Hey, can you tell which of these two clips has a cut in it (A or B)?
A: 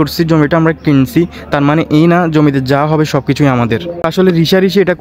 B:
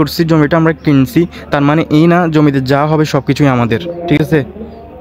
A